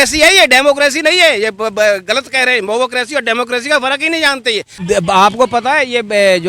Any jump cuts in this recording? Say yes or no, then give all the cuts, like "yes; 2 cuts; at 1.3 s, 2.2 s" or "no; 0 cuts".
yes; 1 cut; at 4.7 s